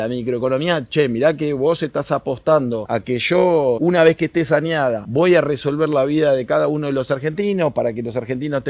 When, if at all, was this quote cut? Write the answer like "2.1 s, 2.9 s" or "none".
2.8 s, 3.8 s, 5.0 s